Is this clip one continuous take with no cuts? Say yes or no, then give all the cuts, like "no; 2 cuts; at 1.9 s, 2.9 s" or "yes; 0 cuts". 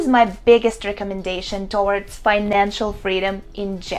yes; 0 cuts